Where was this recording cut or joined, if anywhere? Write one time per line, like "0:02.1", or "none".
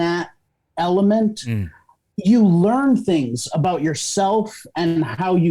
none